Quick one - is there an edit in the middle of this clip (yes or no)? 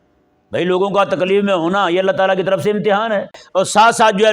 yes